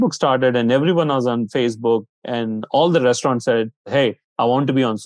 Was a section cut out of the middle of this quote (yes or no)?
yes